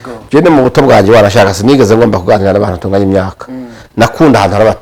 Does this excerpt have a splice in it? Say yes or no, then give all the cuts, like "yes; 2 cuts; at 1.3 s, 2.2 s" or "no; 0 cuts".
no; 0 cuts